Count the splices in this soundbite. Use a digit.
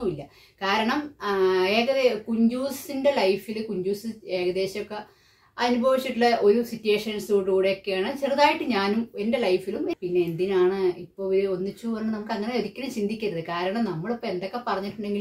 1